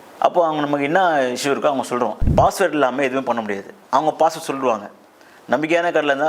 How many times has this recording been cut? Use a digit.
1